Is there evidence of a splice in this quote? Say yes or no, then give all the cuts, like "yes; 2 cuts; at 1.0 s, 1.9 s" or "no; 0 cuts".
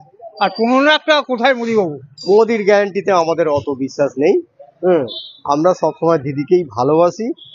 yes; 1 cut; at 2.1 s